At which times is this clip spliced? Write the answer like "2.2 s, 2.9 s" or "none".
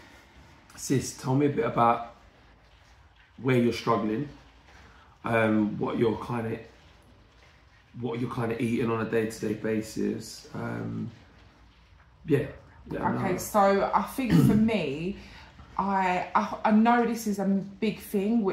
none